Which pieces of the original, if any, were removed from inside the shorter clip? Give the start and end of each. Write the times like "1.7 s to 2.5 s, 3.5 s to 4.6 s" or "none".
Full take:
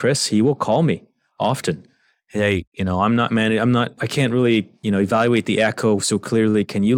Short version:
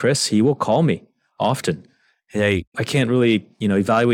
2.7 s to 3.9 s